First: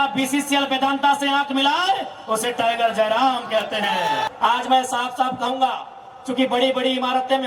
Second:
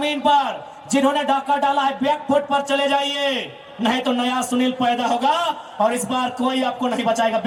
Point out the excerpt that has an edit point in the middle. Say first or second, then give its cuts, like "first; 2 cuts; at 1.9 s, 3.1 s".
first; 1 cut; at 4.2 s